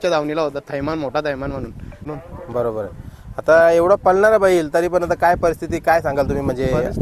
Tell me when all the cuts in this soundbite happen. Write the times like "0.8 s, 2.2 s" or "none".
2.0 s